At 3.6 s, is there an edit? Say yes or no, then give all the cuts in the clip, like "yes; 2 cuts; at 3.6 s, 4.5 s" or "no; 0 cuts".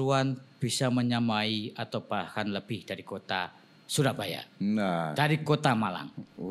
no; 0 cuts